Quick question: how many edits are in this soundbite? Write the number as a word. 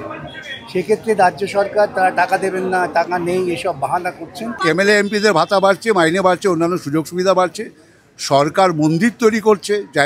one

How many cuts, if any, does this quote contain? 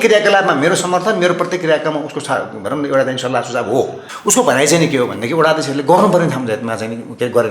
one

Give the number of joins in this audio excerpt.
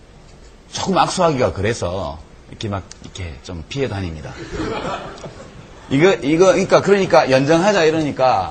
zero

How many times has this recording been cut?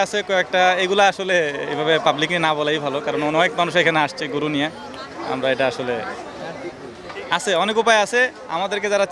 zero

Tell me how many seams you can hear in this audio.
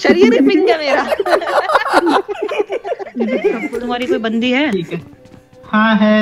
one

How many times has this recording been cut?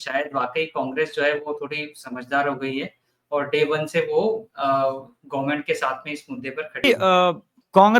one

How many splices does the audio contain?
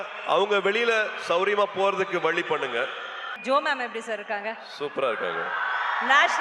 one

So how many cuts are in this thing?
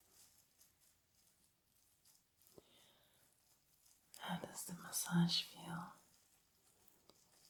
zero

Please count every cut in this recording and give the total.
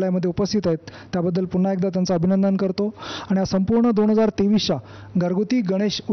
zero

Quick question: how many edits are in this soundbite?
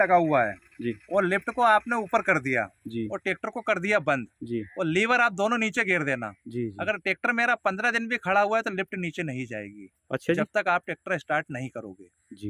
zero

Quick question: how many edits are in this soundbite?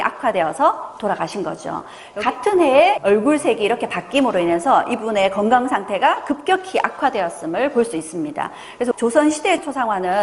one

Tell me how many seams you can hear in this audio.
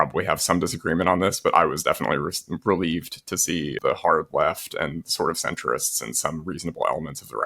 one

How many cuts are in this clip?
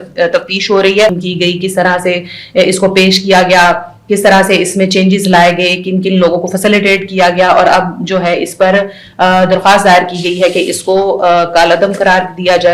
one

